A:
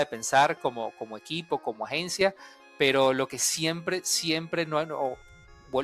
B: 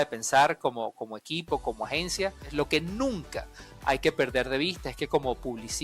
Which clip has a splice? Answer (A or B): B